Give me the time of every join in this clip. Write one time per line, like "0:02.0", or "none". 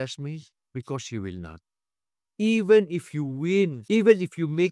0:03.8